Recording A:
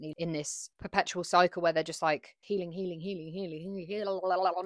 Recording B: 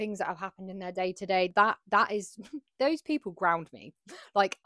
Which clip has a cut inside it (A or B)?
B